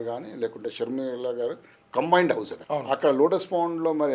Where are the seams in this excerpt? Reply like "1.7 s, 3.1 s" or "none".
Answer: 2.5 s

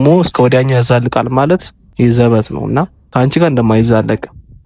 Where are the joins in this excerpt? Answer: 1.8 s, 3.0 s

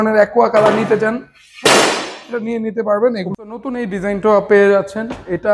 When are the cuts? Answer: 3.3 s

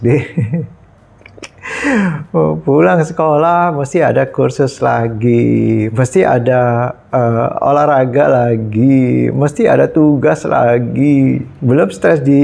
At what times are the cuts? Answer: 11.5 s

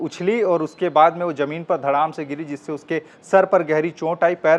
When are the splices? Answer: none

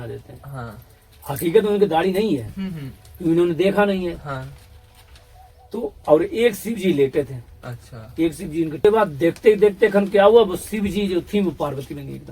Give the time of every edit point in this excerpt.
8.8 s

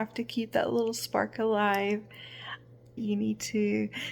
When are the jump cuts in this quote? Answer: 3.0 s

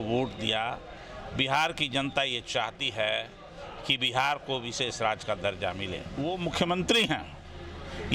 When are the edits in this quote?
6.0 s

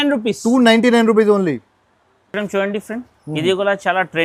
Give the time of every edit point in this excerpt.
none

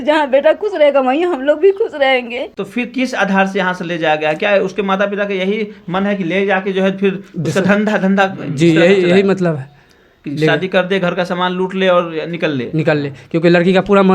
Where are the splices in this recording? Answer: 2.5 s

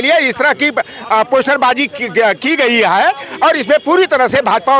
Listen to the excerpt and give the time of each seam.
none

